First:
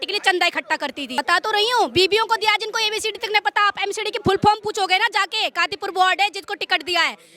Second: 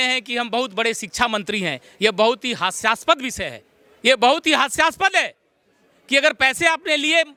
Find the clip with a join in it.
first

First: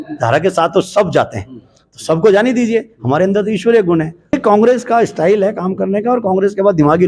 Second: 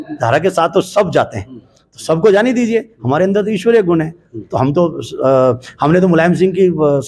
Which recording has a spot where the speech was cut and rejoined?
first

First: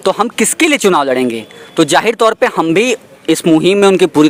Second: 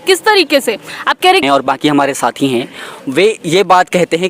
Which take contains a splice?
second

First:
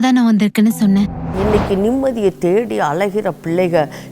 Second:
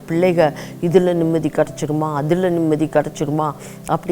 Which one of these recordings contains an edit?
first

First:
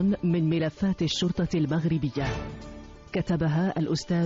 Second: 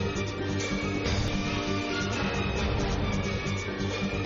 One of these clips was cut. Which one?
second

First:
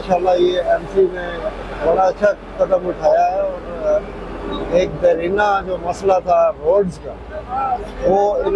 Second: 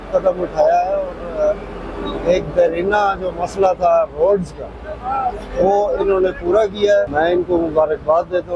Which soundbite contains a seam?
second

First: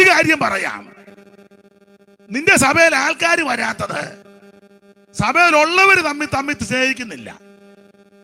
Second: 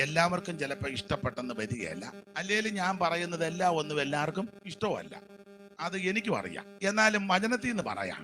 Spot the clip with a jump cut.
second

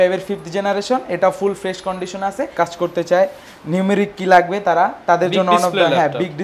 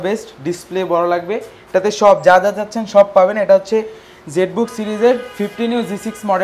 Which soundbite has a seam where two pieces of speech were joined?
first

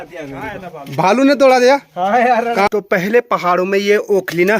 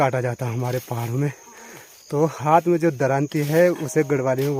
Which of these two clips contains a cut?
first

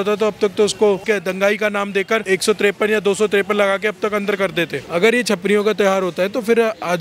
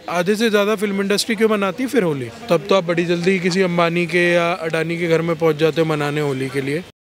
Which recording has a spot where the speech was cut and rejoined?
first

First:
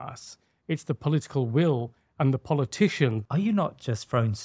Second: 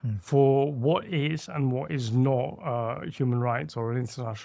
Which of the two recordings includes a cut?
first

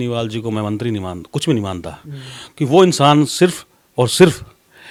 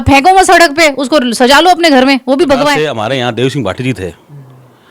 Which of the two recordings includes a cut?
second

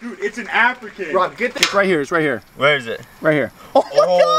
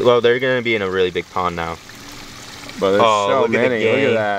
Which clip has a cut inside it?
first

